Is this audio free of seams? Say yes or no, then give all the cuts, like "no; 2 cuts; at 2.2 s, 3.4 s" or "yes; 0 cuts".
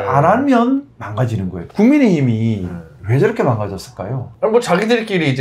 yes; 0 cuts